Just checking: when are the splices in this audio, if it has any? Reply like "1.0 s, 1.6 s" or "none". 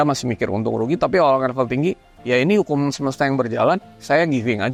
none